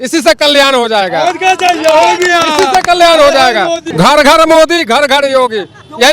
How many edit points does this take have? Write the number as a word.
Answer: one